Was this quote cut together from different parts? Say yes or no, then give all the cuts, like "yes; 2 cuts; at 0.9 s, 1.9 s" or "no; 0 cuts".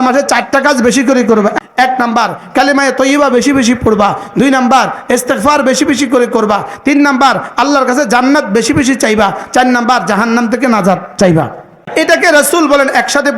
yes; 2 cuts; at 1.6 s, 11.8 s